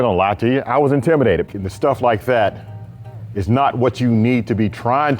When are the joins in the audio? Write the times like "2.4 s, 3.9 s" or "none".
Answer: 1.5 s